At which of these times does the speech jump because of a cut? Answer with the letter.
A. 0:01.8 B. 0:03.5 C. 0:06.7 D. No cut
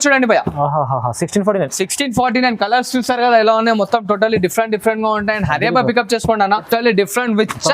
C